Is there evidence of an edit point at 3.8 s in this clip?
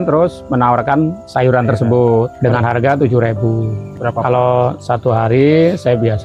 yes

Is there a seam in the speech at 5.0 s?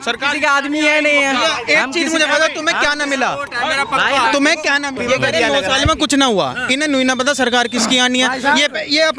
yes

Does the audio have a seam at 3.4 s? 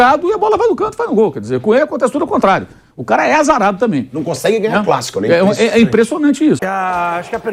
no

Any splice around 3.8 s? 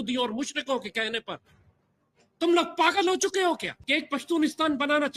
yes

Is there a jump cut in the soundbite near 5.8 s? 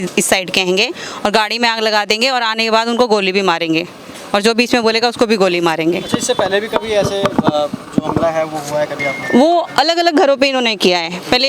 no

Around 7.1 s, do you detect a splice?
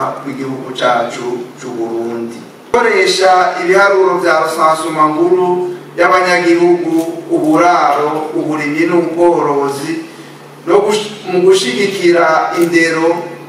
no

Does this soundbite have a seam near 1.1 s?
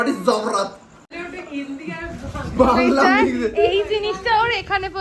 yes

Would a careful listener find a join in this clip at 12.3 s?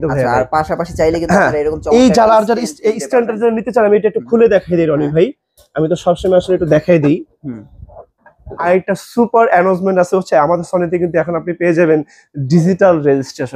no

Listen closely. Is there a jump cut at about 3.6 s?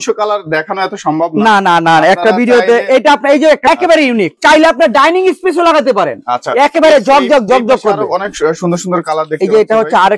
yes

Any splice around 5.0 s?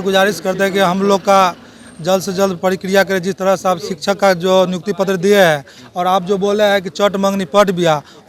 no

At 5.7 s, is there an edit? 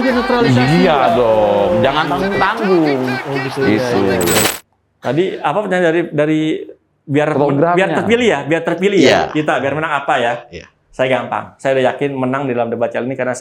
no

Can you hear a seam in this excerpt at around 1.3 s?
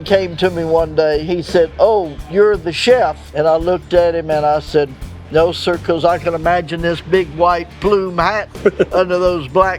yes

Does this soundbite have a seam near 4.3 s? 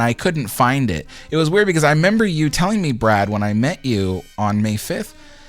no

